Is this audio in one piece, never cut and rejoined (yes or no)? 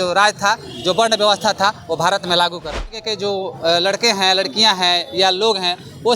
no